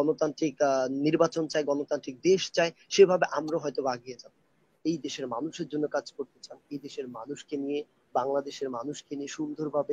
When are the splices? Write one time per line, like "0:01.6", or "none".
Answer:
0:04.7